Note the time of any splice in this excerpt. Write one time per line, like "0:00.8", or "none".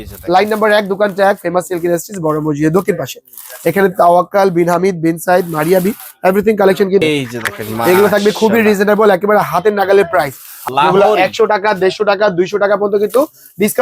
0:07.0
0:10.5